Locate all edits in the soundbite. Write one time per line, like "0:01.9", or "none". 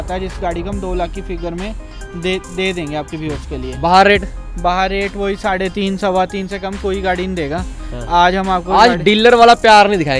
none